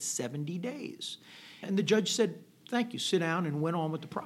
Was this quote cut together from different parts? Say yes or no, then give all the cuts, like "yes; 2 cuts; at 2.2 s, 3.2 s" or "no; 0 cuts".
yes; 1 cut; at 1.6 s